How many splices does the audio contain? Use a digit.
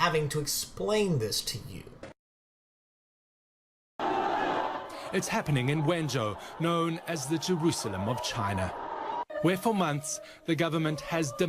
1